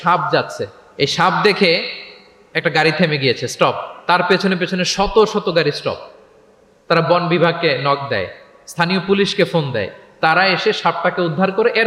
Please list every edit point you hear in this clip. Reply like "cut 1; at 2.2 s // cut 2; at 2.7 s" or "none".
none